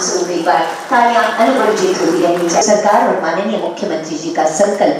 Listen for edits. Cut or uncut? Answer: uncut